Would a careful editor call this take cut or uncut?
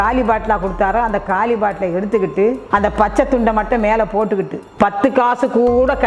cut